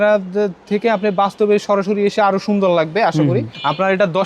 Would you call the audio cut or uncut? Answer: uncut